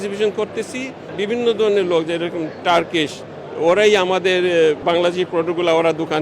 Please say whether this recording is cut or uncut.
cut